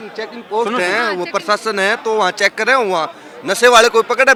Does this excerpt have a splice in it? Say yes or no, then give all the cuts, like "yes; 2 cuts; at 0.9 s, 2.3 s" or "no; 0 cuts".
no; 0 cuts